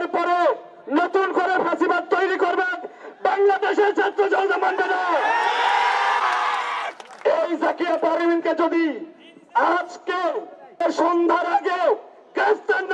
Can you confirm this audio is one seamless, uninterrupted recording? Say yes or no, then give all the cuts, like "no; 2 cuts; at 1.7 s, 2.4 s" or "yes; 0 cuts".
no; 2 cuts; at 6.2 s, 10.8 s